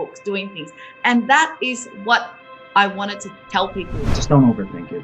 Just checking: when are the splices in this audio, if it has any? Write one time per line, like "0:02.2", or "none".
0:04.0